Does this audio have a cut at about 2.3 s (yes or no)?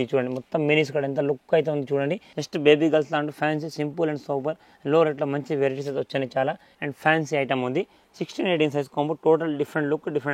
yes